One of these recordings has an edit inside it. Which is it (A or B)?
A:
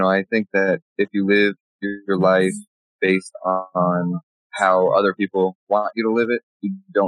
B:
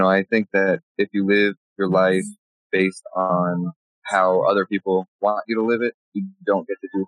B